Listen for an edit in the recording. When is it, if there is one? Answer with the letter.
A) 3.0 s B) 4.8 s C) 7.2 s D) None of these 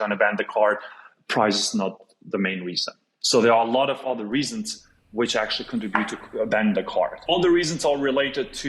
C